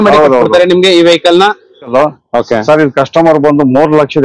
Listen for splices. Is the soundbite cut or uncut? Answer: cut